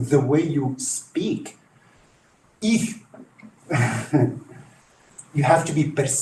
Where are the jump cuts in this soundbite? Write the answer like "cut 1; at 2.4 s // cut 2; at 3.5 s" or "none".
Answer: none

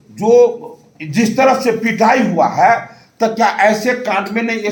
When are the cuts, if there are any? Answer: none

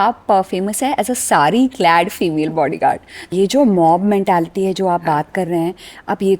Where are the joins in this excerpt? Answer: cut 1; at 3.3 s

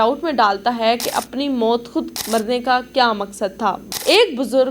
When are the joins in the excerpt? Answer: cut 1; at 2.2 s // cut 2; at 3.8 s

